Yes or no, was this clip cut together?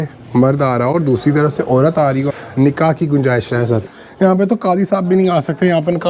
yes